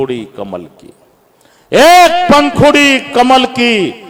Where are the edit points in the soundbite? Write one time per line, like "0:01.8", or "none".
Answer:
none